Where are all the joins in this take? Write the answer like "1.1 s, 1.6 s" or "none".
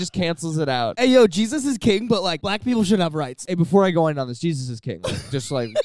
0.9 s, 2.4 s, 3.5 s